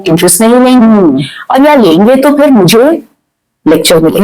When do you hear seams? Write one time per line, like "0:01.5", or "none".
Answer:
none